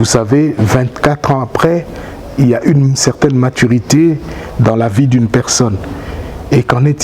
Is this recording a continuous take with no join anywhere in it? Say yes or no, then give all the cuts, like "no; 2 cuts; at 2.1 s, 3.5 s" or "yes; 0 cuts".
yes; 0 cuts